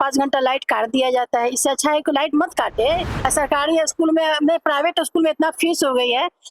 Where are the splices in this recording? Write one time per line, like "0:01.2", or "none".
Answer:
0:03.1